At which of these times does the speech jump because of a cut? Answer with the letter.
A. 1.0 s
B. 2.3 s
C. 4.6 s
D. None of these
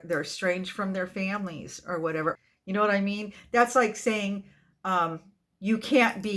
B